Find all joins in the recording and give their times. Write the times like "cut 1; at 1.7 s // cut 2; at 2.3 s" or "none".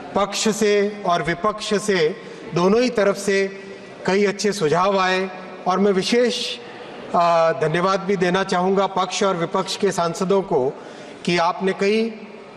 none